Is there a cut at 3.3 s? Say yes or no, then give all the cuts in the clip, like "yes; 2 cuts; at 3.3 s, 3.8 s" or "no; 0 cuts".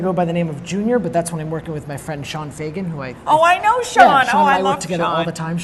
no; 0 cuts